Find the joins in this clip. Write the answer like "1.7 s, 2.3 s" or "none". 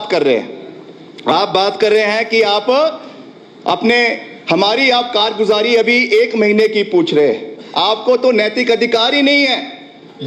none